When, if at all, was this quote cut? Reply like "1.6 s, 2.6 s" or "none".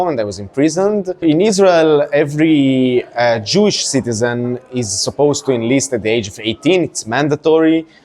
1.2 s